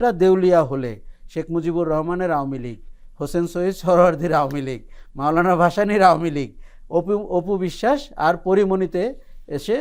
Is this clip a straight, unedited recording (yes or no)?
yes